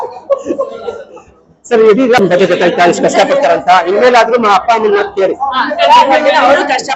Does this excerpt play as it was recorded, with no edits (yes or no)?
no